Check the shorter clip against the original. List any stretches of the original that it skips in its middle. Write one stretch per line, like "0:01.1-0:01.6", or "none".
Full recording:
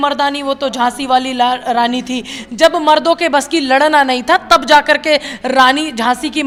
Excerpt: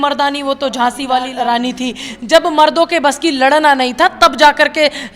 0:01.3-0:01.6

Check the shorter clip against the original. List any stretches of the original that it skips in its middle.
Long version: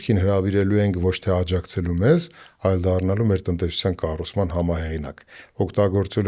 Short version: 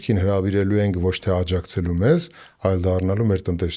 none

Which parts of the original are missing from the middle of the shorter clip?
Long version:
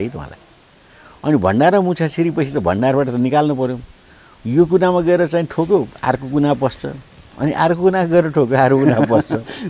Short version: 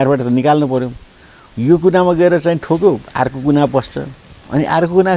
none

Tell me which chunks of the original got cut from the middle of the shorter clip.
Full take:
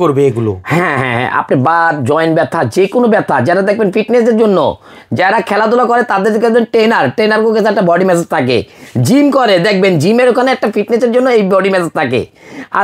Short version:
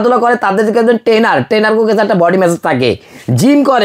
none

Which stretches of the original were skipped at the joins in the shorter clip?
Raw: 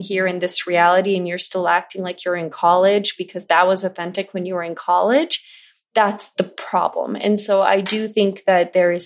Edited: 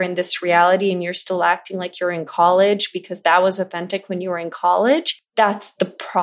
0:05.4-0:05.8

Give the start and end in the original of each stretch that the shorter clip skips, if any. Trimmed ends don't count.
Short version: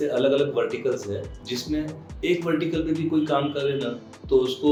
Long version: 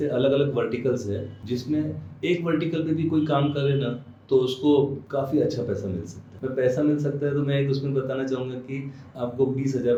none

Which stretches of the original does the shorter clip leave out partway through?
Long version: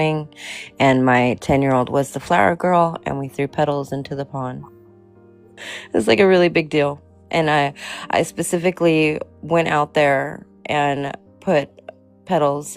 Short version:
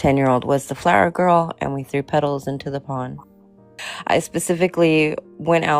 0:05.3-0:07.9

